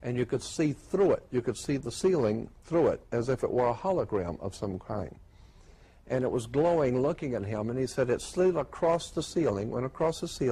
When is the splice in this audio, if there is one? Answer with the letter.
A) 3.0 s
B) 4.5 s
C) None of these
A